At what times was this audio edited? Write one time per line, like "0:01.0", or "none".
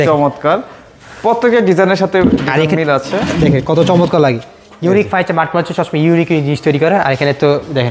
none